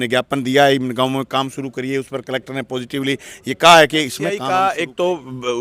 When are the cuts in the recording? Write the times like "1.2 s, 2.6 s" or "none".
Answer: 4.4 s

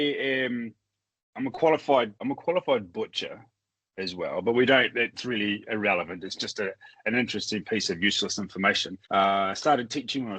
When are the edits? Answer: 2.2 s, 8.9 s

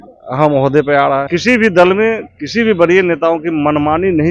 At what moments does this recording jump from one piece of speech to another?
1.3 s

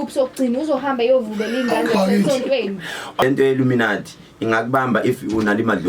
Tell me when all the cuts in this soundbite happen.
3.2 s

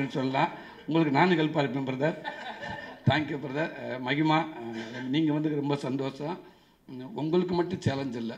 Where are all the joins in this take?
none

